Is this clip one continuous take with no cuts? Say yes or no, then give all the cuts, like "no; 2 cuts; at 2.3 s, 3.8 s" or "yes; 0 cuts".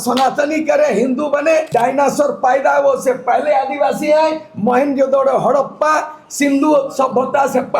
no; 1 cut; at 1.7 s